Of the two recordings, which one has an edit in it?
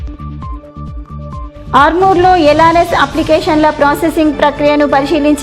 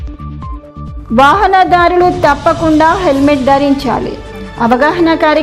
first; 1 cut; at 0.9 s

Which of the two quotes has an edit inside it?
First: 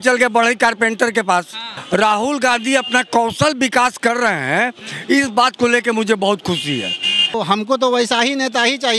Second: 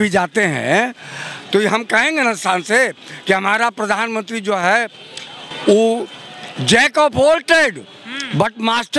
first; 2 cuts; at 1.7 s, 7.3 s

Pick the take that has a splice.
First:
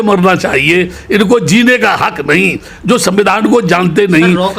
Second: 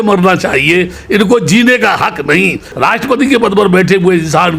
second; 1 cut; at 2.7 s

